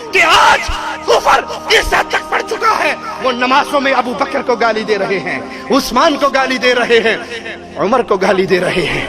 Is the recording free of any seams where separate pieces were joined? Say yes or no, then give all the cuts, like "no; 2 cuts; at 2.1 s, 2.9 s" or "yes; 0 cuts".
yes; 0 cuts